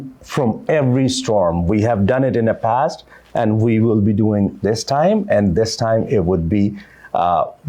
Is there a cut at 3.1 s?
no; 0 cuts

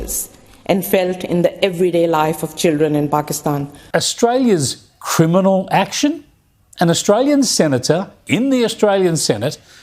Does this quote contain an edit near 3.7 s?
yes; 1 cut; at 3.7 s

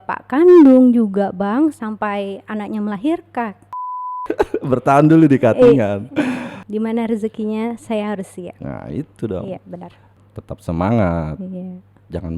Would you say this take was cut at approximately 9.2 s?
no; 1 cut; at 4.1 s

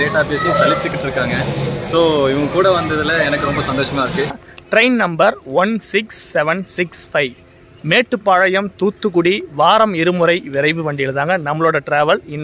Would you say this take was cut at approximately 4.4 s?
yes; 1 cut; at 4.4 s

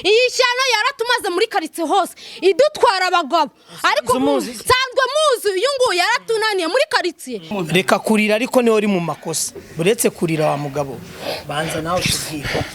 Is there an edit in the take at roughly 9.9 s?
no; 1 cut; at 7.5 s

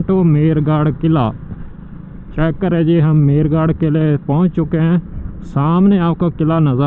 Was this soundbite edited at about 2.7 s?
no; 0 cuts

